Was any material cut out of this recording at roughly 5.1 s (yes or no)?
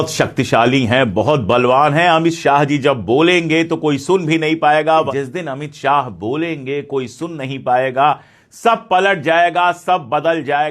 yes